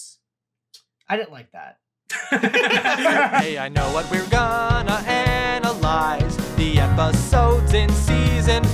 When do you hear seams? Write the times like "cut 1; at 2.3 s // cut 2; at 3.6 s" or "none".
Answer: cut 1; at 3.4 s